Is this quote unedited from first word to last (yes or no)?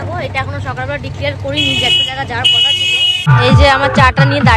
no